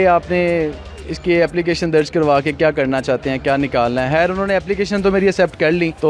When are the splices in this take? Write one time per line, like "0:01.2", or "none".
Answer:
none